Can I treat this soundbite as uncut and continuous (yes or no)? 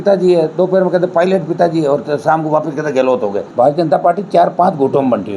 no